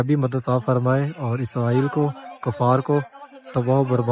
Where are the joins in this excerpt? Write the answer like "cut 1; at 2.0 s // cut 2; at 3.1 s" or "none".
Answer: cut 1; at 3.0 s